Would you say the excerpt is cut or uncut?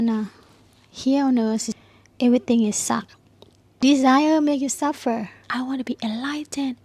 cut